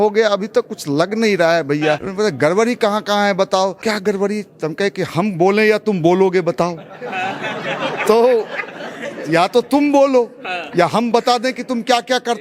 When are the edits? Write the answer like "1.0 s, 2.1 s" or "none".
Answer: 2.1 s, 3.8 s